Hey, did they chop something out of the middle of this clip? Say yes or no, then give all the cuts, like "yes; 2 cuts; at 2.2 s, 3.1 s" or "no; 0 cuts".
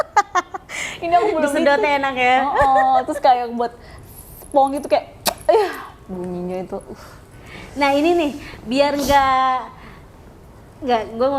no; 0 cuts